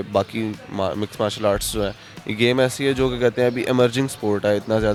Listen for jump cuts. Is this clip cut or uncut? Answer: uncut